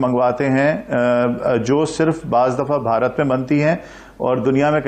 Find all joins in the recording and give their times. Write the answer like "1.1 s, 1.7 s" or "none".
none